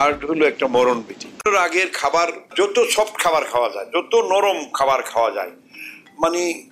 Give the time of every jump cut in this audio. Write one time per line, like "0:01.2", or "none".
0:01.4